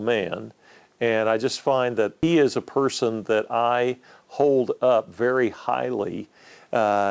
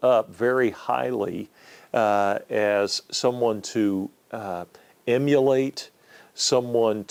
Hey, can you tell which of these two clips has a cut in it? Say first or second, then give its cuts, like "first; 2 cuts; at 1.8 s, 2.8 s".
first; 1 cut; at 2.2 s